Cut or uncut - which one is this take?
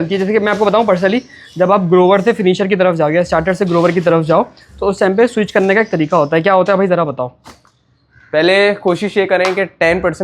uncut